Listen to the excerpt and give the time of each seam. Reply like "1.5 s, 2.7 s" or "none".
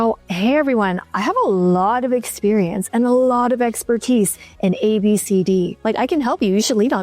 1.0 s, 5.7 s